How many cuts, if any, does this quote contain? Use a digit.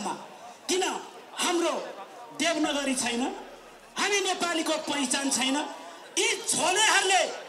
1